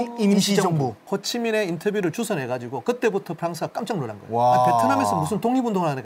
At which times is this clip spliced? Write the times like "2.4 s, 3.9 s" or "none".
1.0 s